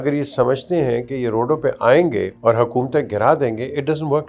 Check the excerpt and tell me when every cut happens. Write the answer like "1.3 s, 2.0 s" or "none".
2.3 s